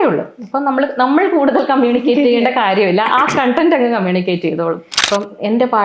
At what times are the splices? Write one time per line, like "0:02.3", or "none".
0:04.9